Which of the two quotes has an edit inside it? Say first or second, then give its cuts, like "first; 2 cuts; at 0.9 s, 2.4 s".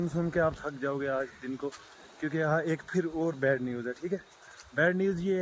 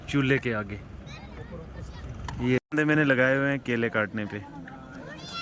second; 1 cut; at 2.6 s